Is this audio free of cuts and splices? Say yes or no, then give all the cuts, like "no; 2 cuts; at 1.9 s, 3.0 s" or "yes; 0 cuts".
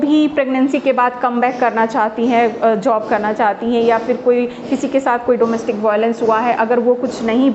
yes; 0 cuts